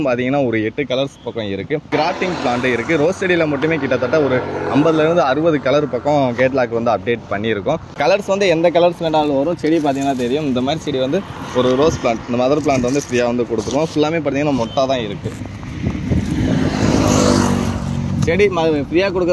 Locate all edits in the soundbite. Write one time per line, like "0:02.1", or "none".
0:01.9
0:07.9

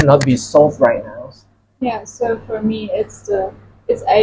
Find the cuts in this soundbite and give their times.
none

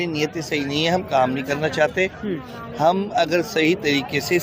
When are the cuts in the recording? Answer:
none

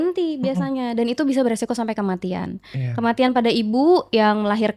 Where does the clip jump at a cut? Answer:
none

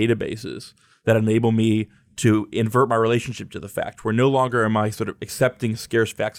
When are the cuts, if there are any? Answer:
none

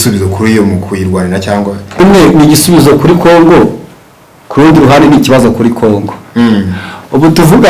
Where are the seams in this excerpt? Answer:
0:02.0

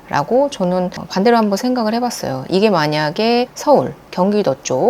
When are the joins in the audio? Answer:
none

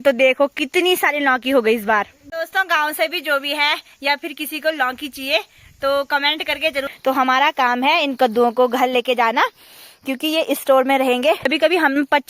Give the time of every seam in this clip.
0:02.2
0:06.9
0:11.5

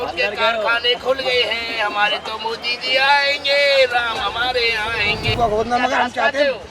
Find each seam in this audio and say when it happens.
0:05.3

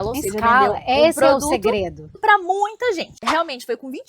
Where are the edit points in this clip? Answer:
0:02.1
0:03.2

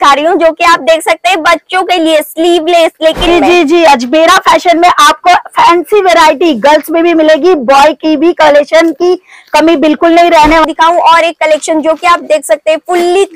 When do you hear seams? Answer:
0:03.3
0:10.7

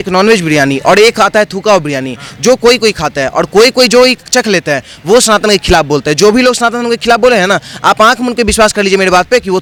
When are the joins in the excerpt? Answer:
none

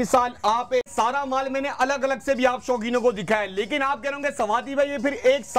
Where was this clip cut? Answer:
0:00.9

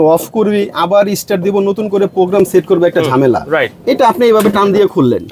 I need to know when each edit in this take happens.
none

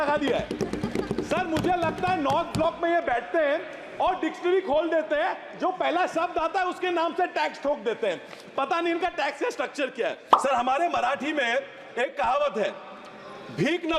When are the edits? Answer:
0:10.3

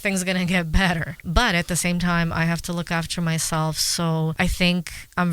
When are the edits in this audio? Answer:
0:01.2
0:04.3

